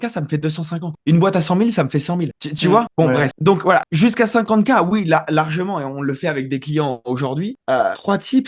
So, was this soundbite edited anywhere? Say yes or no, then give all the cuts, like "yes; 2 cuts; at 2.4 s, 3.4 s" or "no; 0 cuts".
no; 0 cuts